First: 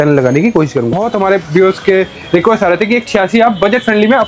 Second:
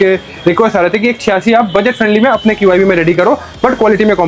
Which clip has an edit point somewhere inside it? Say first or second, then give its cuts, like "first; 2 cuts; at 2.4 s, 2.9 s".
first; 1 cut; at 1.0 s